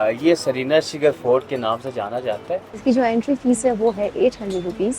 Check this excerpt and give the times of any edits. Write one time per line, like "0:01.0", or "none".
0:02.7